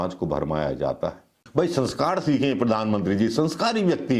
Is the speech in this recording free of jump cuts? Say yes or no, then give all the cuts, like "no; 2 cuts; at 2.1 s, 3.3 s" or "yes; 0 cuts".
no; 1 cut; at 1.4 s